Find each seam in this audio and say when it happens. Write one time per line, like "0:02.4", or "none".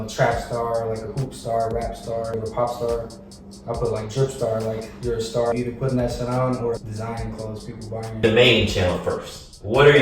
0:02.4
0:05.5
0:06.8
0:08.2